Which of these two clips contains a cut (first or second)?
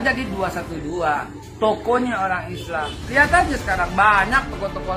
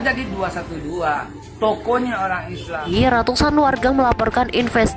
second